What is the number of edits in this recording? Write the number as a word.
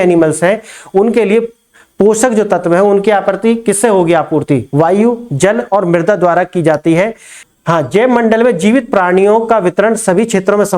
one